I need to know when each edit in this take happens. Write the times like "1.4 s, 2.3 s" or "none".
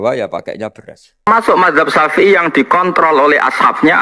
1.3 s